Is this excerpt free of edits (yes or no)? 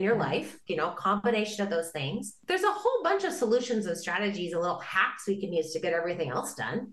no